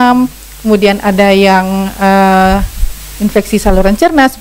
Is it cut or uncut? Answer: uncut